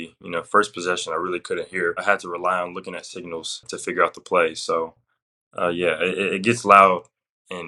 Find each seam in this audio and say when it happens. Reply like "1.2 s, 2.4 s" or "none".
2.0 s, 3.7 s